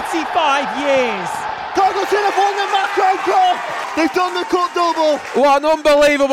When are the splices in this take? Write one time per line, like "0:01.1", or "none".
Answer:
0:01.6
0:03.8
0:05.2